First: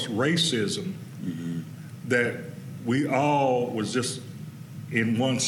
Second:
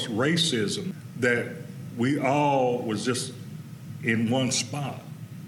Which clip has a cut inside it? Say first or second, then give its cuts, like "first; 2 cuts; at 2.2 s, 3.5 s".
second; 1 cut; at 1.0 s